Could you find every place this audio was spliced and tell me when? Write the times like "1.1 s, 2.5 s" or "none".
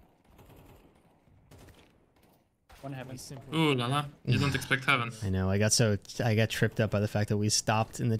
5.1 s